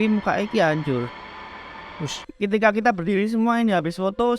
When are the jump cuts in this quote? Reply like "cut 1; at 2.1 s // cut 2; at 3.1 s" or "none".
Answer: cut 1; at 2.3 s